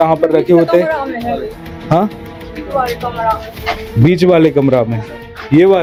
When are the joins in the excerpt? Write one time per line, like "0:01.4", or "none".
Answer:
none